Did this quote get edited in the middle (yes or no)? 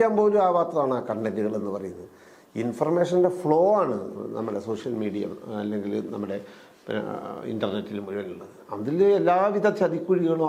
no